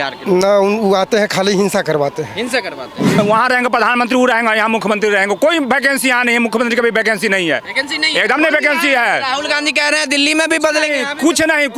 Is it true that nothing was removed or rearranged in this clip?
no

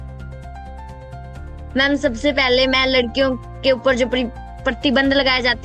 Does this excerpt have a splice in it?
no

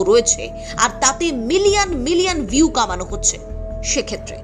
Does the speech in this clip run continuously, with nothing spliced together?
yes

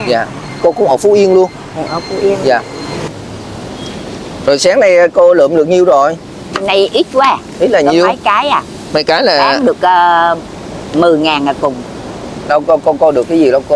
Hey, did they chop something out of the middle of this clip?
yes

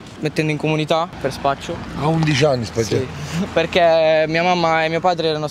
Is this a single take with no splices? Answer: no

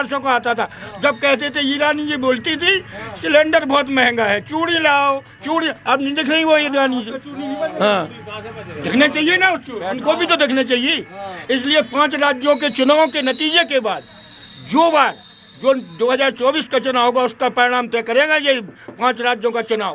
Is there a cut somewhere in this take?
no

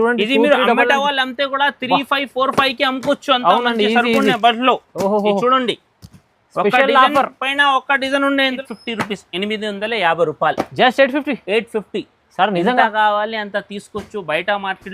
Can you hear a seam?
yes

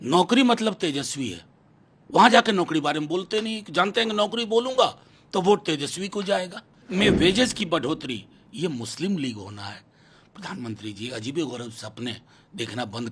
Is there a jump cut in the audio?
yes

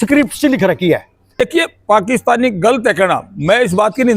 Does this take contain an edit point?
yes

